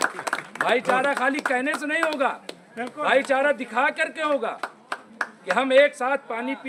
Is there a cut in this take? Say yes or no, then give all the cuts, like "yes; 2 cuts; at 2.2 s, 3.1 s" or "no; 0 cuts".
no; 0 cuts